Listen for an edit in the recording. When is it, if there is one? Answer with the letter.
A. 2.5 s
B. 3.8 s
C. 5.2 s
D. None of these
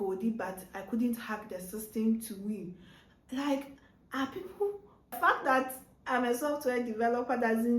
C